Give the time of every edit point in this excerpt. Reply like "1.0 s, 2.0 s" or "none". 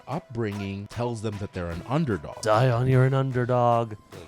0.9 s, 2.4 s